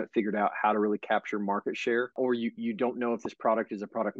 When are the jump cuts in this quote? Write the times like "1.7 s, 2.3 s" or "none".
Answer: none

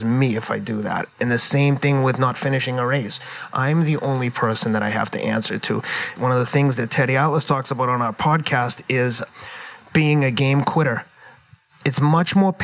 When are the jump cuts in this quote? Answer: 1.2 s, 6.1 s, 9.3 s

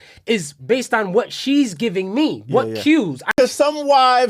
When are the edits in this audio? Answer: 3.3 s

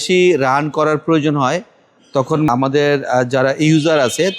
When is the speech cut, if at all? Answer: 2.5 s

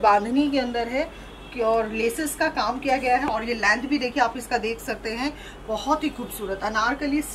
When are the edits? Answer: none

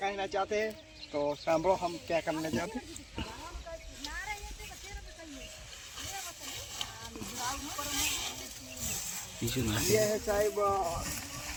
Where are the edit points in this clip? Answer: none

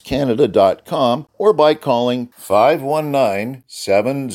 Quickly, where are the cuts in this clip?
1.3 s

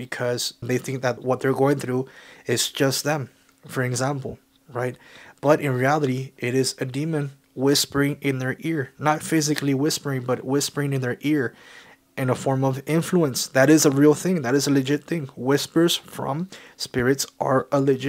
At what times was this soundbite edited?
1.1 s

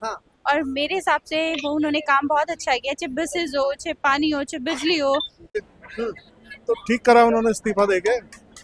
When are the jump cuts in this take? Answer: 5.6 s

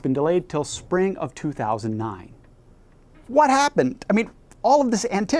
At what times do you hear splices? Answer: none

